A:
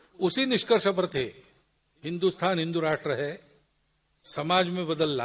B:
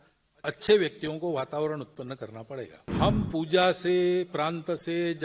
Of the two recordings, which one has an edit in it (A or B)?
B